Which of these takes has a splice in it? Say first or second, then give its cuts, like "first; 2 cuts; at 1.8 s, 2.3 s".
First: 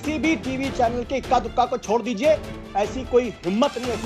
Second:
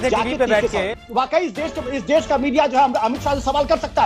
second; 1 cut; at 1.0 s